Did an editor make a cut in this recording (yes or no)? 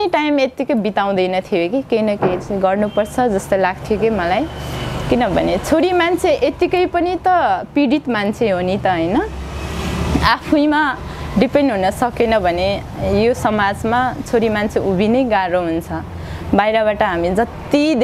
no